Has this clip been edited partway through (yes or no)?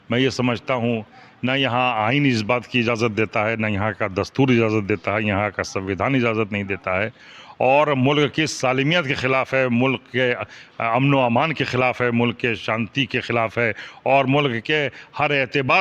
no